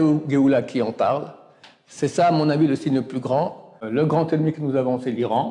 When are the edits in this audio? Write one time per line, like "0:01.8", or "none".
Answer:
0:03.8

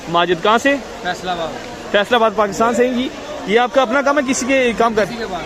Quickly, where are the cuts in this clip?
none

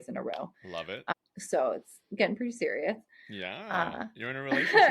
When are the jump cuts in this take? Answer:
0:00.9

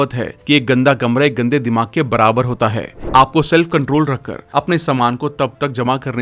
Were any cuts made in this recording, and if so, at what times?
0:02.9

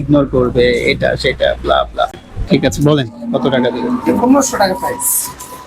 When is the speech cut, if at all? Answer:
0:02.3

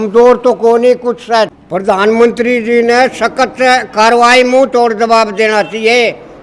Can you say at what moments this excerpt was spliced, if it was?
0:01.5

